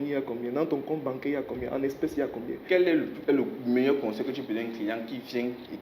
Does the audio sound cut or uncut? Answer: cut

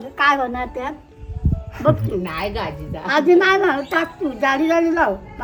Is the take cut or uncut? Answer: uncut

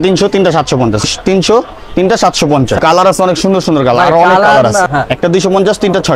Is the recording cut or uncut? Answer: cut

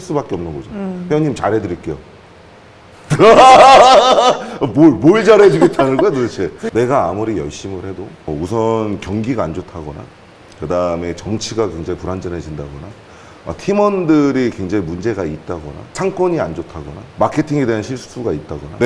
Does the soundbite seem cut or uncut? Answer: cut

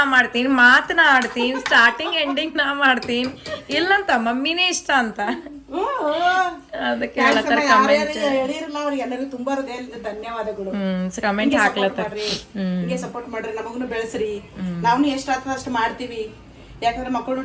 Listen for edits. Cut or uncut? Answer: uncut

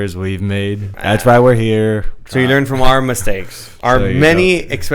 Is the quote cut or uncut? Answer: cut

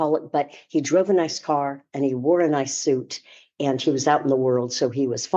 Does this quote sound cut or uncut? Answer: uncut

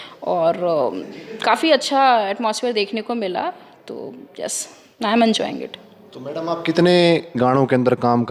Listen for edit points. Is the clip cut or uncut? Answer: uncut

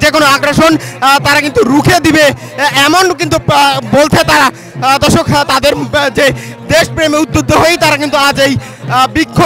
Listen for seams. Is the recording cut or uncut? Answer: uncut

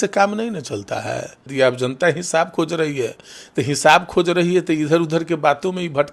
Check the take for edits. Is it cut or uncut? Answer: cut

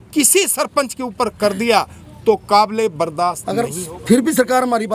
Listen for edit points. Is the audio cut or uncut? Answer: cut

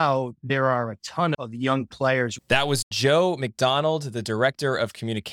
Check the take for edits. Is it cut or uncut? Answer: cut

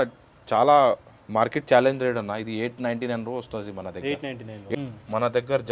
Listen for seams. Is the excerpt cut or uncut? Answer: cut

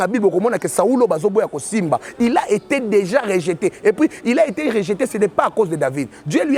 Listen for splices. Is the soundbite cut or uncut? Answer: uncut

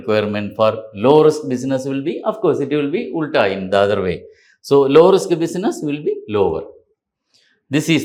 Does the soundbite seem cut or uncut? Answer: uncut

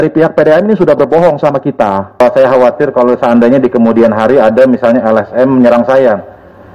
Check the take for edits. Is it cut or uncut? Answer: cut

